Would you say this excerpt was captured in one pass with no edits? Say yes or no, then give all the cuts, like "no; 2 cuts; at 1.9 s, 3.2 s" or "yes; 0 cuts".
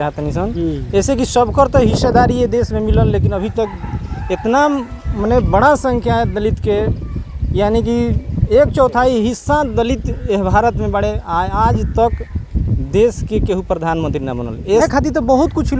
no; 1 cut; at 14.8 s